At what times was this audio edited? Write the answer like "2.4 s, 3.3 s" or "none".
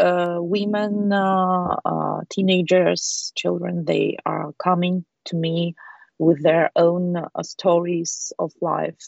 none